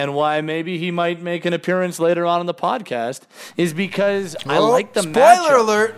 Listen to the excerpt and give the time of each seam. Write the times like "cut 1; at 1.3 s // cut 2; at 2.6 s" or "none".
none